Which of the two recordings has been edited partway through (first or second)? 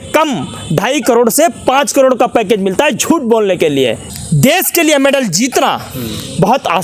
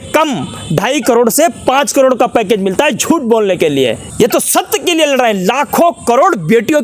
first